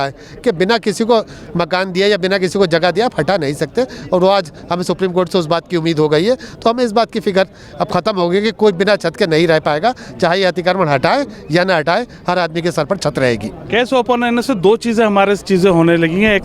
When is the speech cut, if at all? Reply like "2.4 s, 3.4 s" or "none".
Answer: none